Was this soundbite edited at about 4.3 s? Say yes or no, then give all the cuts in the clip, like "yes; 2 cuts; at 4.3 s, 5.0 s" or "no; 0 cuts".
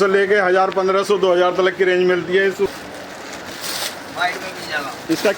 no; 1 cut; at 2.7 s